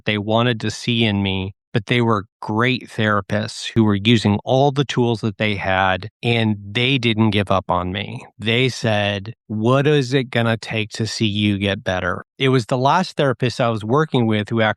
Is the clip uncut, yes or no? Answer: yes